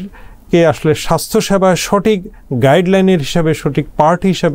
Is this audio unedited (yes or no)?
yes